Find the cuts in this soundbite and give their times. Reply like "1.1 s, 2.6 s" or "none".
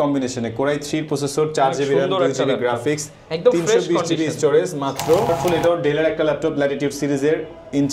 5.3 s